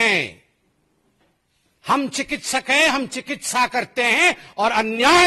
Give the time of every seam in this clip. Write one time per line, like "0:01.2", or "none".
none